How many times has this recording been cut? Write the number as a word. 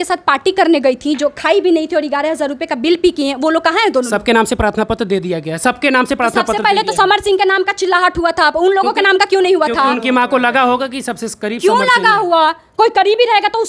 zero